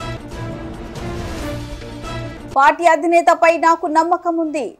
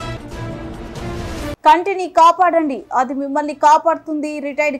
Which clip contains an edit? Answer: second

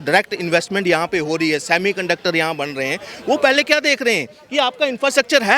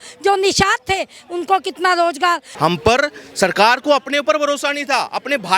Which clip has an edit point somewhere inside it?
second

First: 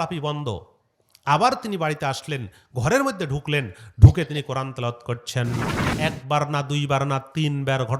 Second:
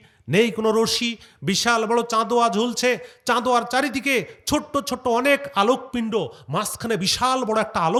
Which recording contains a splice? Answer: first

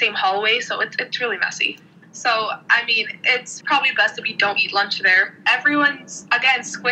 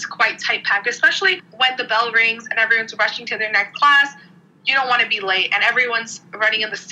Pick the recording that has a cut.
first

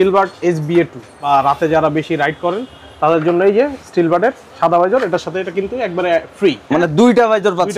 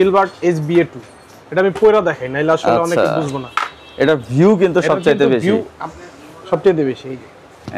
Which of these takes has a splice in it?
first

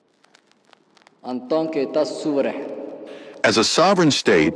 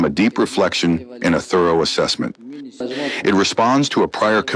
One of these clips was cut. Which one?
second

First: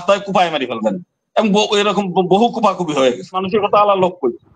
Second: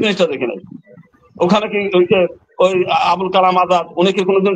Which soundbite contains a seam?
first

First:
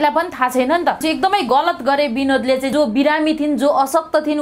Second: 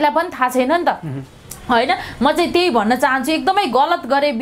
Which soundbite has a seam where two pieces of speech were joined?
first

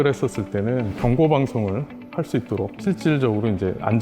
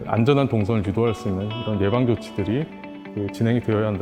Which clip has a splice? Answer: first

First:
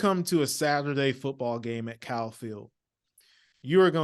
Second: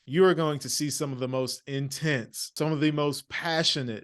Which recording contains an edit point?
second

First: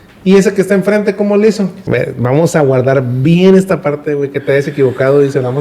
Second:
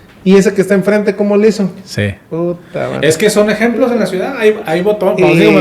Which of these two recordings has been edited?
first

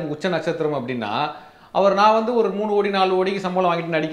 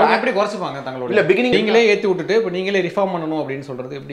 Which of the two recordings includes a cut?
second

